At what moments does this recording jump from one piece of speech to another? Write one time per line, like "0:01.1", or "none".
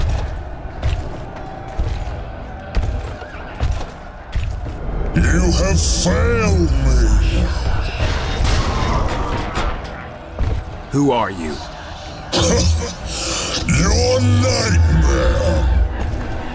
none